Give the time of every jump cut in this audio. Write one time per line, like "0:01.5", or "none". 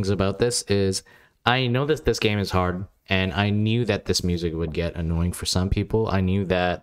none